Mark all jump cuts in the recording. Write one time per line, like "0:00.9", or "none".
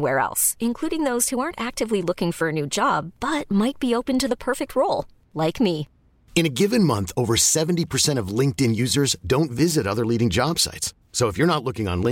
none